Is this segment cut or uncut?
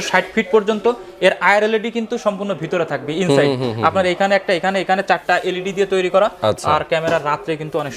uncut